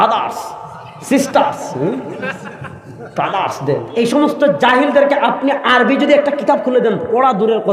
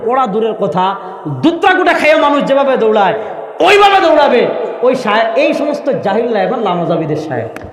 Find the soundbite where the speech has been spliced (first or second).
first